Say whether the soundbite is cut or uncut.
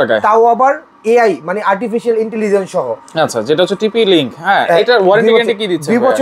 uncut